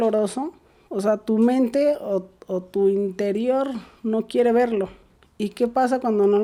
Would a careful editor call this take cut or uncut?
uncut